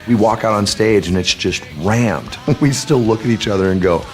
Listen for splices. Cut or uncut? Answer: cut